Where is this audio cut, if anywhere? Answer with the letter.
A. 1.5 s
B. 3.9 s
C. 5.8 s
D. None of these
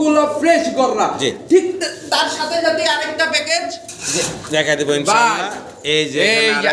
D